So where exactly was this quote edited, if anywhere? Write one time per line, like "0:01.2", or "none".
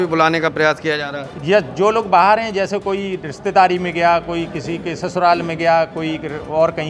none